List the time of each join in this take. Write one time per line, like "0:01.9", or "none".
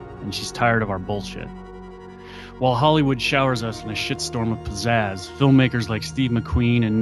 0:01.6